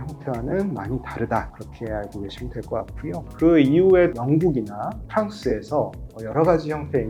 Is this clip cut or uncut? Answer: uncut